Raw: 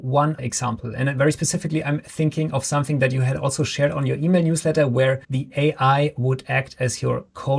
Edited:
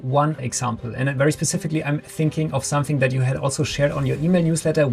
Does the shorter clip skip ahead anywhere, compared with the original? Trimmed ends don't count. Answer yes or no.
no